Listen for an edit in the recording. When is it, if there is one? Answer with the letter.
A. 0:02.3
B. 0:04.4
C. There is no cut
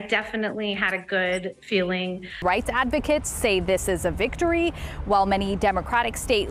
A